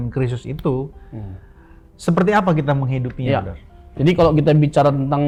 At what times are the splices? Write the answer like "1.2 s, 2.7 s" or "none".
none